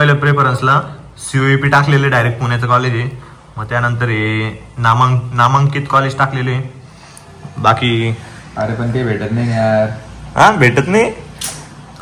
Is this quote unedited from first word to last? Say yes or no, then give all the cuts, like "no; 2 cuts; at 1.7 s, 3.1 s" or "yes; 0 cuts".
yes; 0 cuts